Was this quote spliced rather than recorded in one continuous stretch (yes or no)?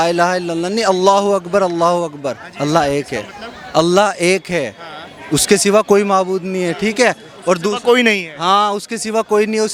no